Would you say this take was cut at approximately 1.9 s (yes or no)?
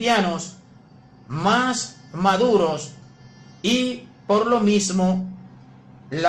yes